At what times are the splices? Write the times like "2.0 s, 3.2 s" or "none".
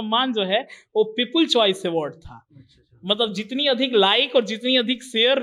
none